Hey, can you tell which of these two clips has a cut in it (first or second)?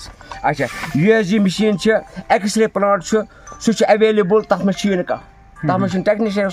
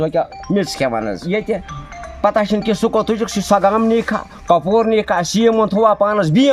second